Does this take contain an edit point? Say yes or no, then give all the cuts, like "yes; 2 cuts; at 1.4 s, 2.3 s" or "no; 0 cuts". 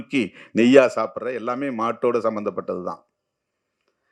no; 0 cuts